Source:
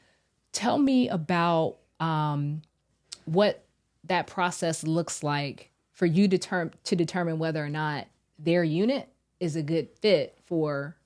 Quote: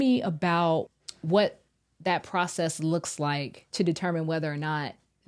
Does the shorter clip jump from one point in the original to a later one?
yes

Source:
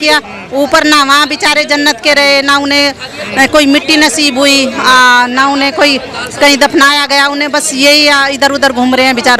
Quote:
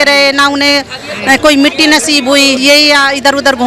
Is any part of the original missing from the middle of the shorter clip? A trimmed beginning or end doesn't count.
yes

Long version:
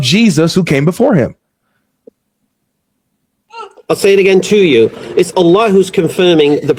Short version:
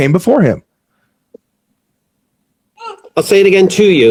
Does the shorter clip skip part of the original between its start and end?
no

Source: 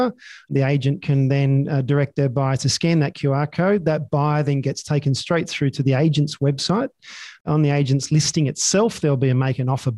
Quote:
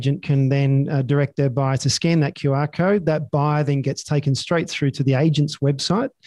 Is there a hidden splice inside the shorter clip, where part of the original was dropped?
no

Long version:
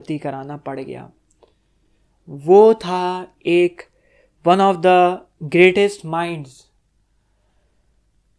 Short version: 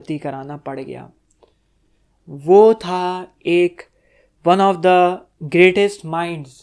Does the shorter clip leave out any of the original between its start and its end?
no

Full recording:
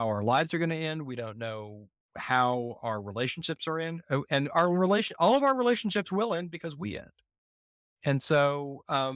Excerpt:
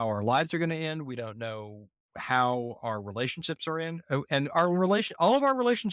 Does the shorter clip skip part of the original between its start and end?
no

